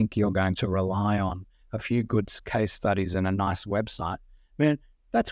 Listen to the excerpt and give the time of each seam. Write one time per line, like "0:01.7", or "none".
none